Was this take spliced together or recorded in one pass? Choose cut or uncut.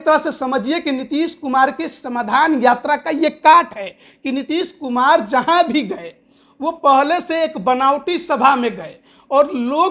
uncut